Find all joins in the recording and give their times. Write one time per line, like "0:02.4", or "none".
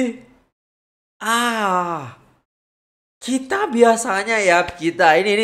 none

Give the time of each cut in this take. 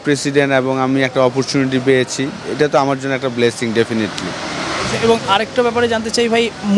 none

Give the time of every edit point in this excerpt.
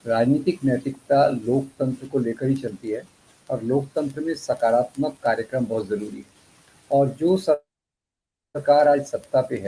none

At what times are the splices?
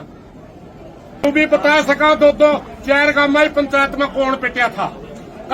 0:01.2

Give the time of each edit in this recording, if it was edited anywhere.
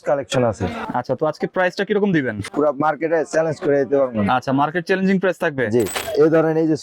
0:00.8
0:02.5
0:06.0

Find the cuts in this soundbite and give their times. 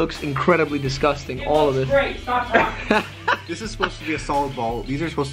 none

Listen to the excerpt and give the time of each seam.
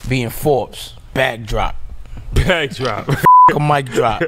none

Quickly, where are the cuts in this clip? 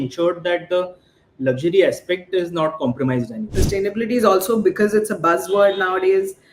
0:03.6

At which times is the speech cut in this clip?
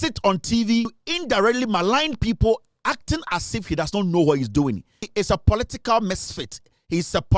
0:01.0
0:05.1

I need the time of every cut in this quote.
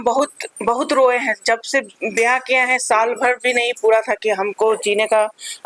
none

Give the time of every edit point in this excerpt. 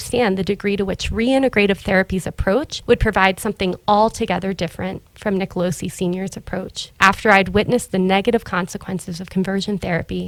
none

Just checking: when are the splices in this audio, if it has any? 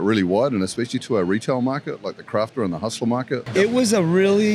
0:03.4

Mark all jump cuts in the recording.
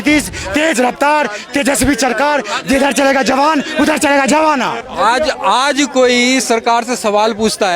0:04.8

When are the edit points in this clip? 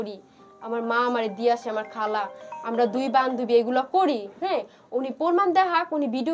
none

